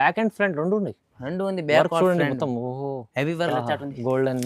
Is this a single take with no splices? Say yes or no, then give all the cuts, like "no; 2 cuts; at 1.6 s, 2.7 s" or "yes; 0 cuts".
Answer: no; 1 cut; at 3.3 s